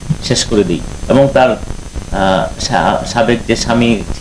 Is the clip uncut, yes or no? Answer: yes